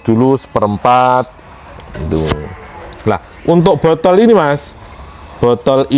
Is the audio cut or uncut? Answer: uncut